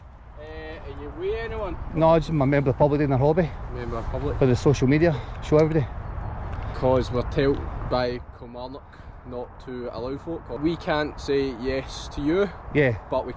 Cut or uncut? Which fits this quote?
cut